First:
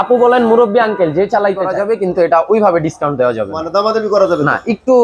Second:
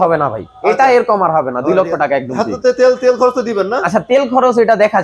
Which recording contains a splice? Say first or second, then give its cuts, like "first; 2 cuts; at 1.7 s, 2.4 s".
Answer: first; 1 cut; at 1.7 s